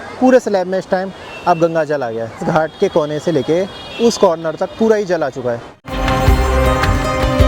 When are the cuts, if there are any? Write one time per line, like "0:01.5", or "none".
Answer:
none